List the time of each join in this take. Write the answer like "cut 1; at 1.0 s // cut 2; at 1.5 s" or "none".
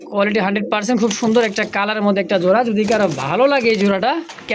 none

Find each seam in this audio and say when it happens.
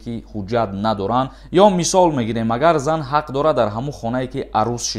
cut 1; at 1.4 s

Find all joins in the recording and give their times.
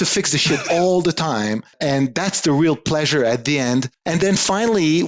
cut 1; at 4.0 s

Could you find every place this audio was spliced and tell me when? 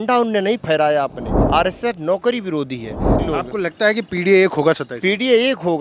cut 1; at 1.3 s // cut 2; at 3.1 s

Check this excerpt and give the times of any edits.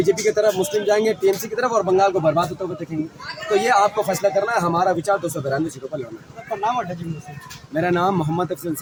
none

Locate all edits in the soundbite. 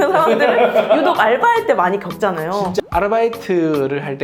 cut 1; at 2.7 s

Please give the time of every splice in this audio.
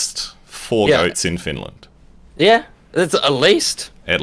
none

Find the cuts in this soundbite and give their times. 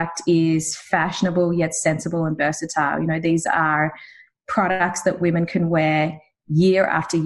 none

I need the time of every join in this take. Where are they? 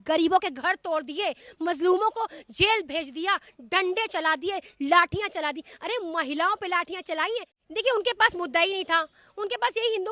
cut 1; at 7.6 s

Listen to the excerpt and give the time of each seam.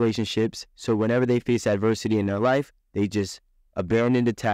none

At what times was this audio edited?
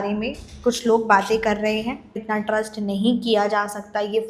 cut 1; at 2.2 s

